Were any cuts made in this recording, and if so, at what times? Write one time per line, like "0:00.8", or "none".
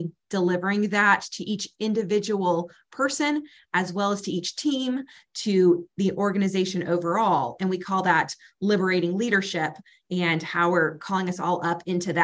none